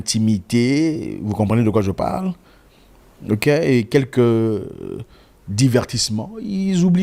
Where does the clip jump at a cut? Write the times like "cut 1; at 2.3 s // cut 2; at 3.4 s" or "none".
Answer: none